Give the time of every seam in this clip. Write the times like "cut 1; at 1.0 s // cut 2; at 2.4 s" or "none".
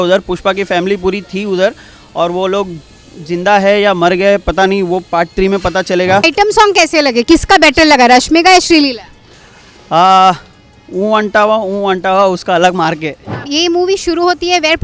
cut 1; at 6.2 s // cut 2; at 13.5 s